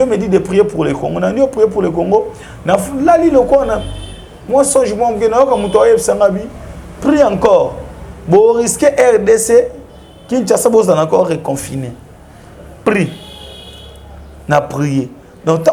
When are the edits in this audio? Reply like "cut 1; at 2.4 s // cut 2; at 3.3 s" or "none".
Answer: none